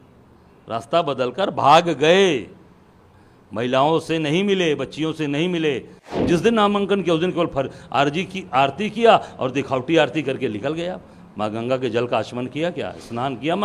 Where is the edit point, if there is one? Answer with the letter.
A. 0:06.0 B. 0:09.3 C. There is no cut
A